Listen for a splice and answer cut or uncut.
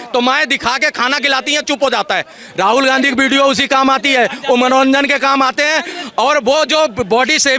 uncut